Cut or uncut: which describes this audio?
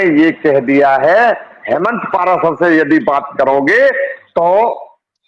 cut